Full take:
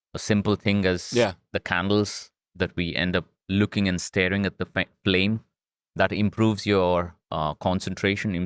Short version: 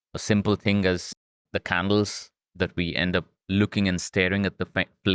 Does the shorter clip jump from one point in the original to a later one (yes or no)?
no